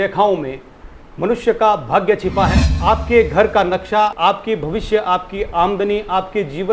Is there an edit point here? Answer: yes; 2 cuts; at 2.7 s, 4.1 s

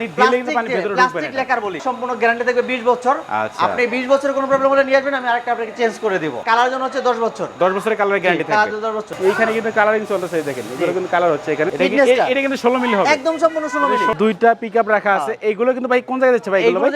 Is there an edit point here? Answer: yes; 5 cuts; at 1.9 s, 6.4 s, 9.1 s, 11.7 s, 14.1 s

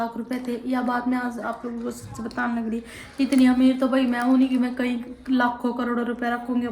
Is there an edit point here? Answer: no; 0 cuts

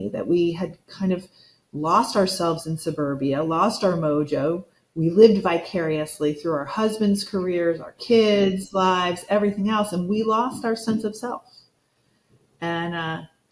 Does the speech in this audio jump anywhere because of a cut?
no; 0 cuts

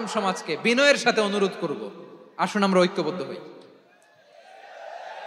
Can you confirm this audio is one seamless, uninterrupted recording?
yes; 0 cuts

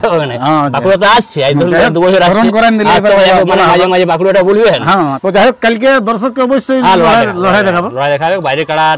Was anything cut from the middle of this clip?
yes; 1 cut; at 5.2 s

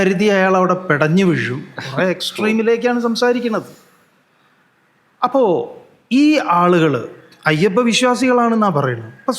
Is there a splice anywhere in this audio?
no; 0 cuts

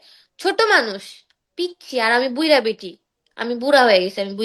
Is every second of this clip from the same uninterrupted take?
yes; 0 cuts

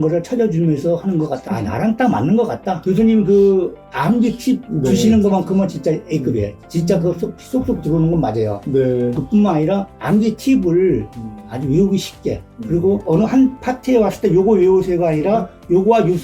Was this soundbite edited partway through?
yes; 2 cuts; at 1.4 s, 2.9 s

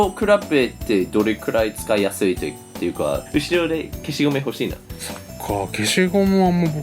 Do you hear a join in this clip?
yes; 1 cut; at 3.2 s

